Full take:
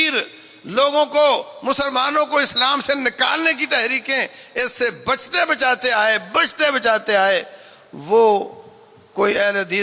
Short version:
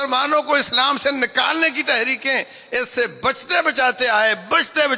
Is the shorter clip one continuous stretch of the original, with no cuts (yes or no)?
yes